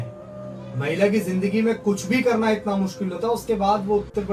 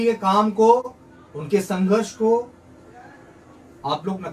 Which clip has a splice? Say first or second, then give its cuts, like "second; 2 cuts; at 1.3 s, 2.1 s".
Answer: first; 1 cut; at 1.4 s